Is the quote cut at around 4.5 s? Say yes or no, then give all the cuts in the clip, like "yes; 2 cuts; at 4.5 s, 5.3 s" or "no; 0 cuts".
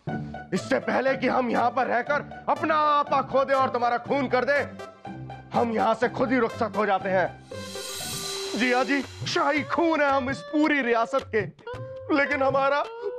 no; 1 cut; at 8.1 s